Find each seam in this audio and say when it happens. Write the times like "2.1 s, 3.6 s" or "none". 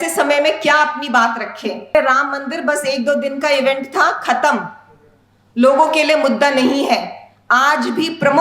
1.9 s